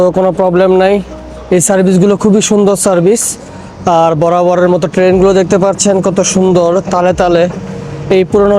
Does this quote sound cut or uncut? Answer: uncut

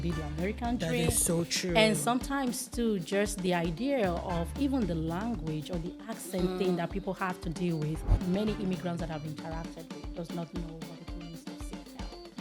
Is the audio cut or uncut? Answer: cut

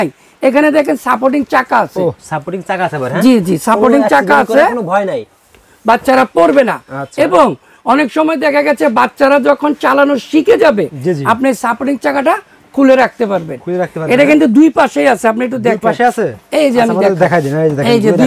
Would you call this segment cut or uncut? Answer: uncut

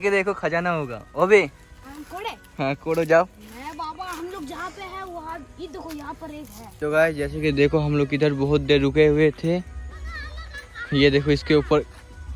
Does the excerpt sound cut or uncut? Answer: cut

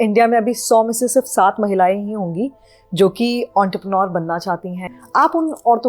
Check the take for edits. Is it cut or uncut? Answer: cut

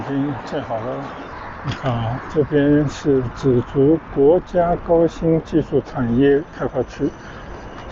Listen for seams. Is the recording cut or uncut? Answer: cut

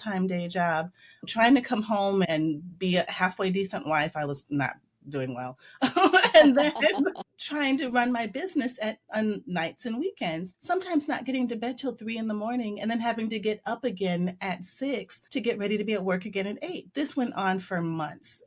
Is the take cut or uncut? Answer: cut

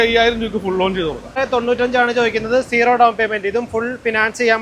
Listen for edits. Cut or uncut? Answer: cut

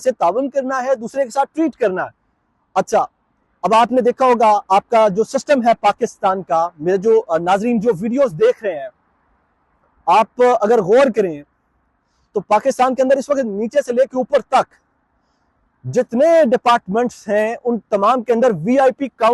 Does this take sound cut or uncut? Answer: uncut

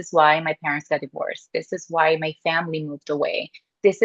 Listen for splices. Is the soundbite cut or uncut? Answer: uncut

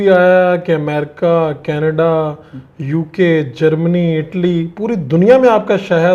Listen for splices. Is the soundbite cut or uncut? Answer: uncut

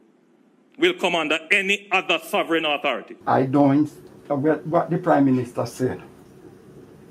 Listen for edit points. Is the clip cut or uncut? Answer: cut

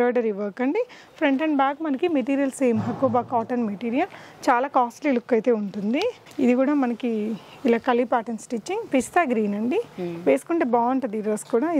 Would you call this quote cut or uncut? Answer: uncut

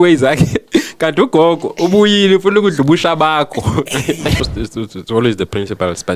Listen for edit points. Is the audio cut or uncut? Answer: cut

